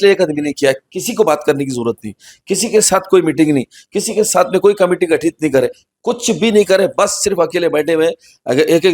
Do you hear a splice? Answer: no; 0 cuts

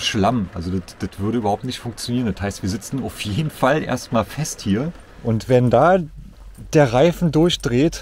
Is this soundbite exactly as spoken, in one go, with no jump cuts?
no; 1 cut; at 5.1 s

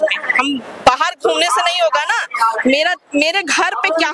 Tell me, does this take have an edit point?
no; 0 cuts

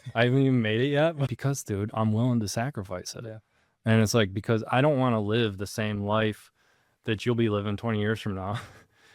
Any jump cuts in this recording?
yes; 1 cut; at 1.3 s

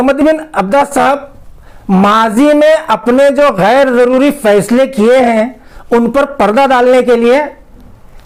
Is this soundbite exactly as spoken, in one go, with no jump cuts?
yes; 0 cuts

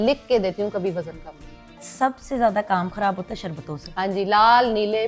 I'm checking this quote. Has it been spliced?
yes; 1 cut; at 1.8 s

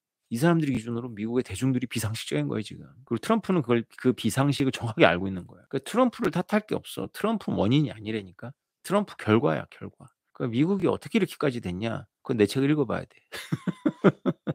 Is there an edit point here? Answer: no; 0 cuts

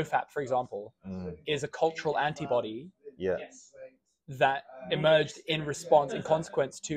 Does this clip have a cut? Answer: no; 0 cuts

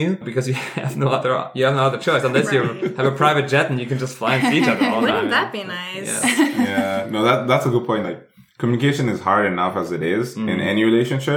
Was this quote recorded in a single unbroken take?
yes; 0 cuts

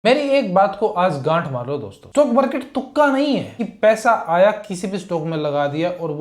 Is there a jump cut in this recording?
no; 0 cuts

